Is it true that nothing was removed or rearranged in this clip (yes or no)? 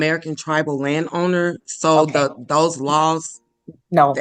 yes